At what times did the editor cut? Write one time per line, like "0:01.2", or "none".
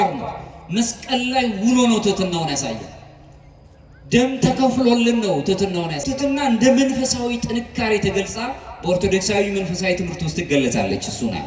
0:06.1